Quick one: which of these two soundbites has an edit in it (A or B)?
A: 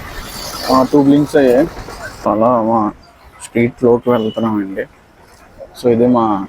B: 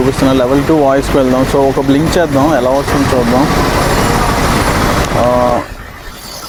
A